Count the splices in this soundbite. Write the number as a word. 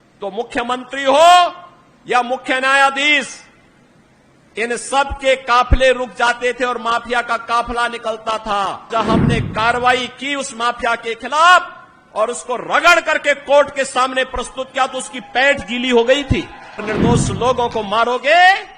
two